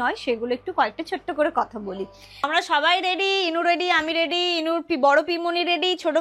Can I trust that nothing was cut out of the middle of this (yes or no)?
no